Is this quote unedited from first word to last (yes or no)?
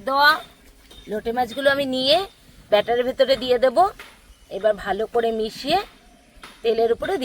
yes